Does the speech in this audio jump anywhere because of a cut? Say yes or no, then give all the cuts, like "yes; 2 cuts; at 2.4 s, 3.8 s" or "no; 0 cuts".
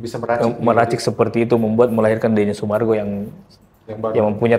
no; 0 cuts